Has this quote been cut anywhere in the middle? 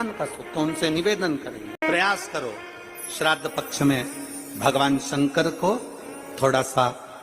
yes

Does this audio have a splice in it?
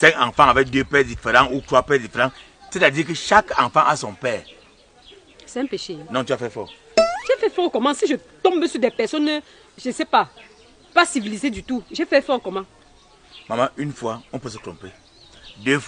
no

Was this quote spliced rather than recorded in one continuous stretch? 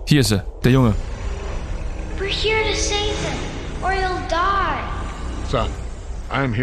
no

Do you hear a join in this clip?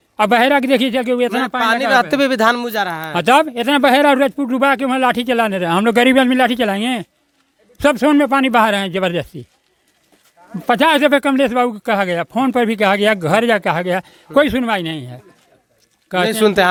no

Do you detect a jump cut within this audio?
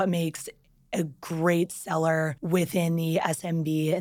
yes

